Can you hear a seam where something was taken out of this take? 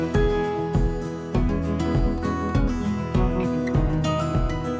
no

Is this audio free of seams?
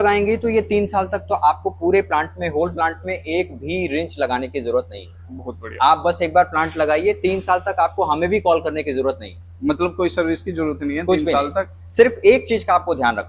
yes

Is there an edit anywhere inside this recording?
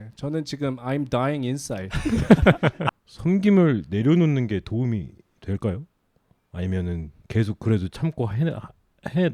yes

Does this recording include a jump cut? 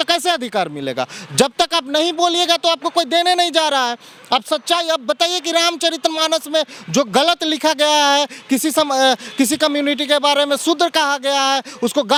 no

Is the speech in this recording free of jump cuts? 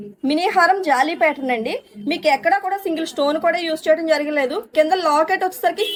yes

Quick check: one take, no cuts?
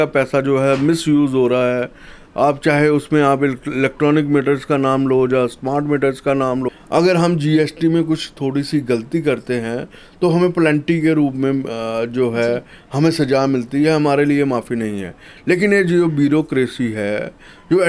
no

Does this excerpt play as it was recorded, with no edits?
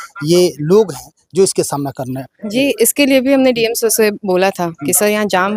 yes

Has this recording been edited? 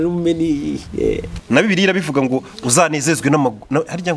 yes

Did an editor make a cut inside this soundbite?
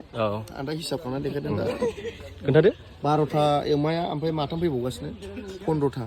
no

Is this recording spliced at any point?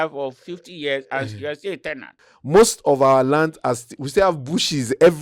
yes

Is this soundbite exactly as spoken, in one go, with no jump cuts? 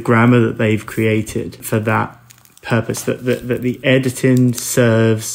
no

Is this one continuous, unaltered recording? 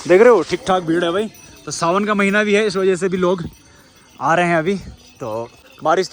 yes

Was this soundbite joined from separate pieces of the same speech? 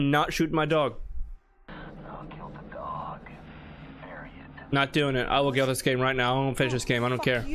yes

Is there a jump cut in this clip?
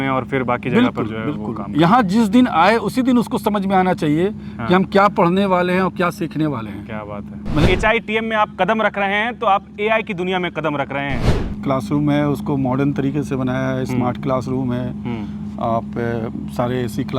yes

